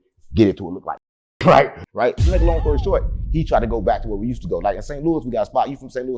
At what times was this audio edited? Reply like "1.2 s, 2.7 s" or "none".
1.8 s